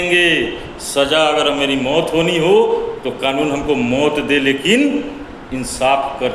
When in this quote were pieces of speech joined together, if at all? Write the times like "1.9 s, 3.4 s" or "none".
2.4 s